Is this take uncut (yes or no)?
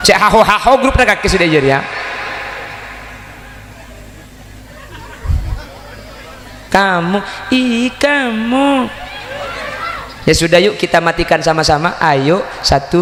yes